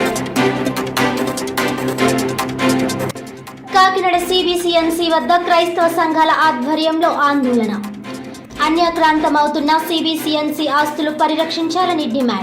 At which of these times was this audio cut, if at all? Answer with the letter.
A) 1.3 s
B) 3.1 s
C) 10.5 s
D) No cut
B